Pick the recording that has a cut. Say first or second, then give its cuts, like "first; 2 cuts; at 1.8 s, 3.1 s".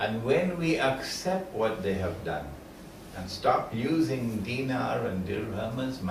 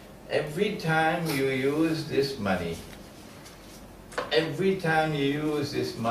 second; 1 cut; at 4.5 s